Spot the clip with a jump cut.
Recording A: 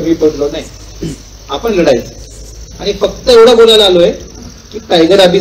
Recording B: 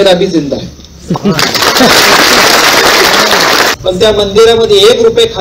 B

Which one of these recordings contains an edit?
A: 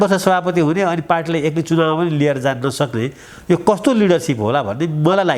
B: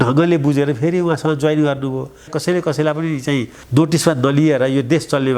B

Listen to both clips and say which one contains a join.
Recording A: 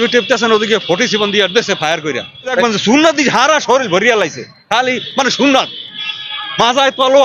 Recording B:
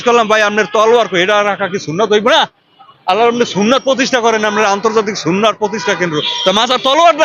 A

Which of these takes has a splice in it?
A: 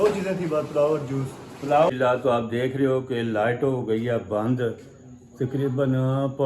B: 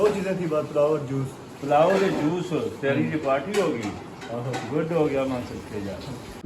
A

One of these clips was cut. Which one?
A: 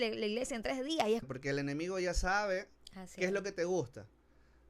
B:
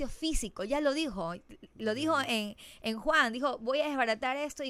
A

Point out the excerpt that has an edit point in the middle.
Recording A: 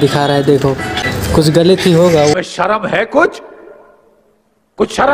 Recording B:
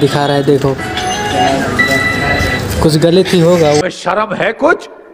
A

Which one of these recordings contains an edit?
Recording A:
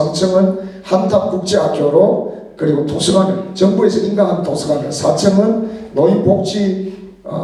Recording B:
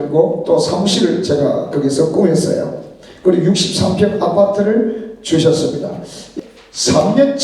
B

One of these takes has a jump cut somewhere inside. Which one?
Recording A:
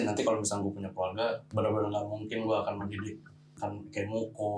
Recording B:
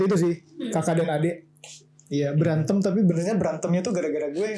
A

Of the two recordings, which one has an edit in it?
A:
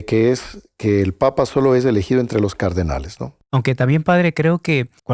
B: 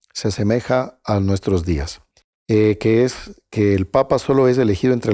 A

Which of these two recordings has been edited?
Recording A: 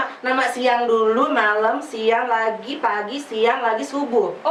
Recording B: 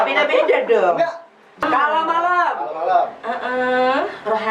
B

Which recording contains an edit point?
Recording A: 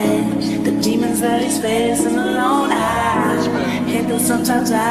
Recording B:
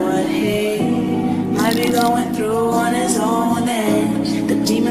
B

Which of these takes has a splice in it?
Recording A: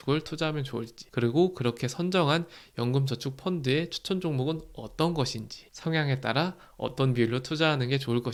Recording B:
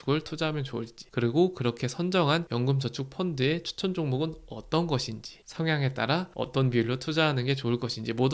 B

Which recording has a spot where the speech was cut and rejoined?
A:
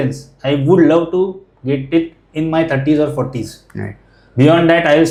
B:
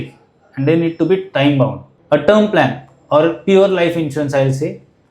B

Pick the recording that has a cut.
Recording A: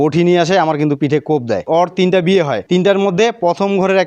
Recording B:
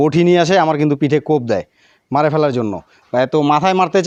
A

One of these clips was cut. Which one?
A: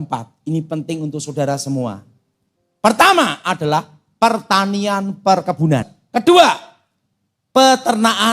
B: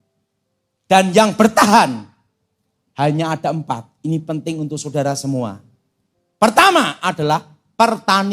A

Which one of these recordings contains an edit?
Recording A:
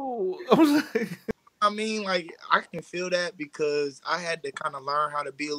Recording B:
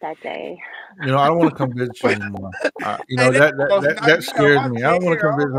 A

